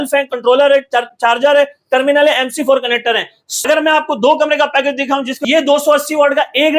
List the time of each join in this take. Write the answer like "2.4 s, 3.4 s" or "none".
3.5 s, 5.4 s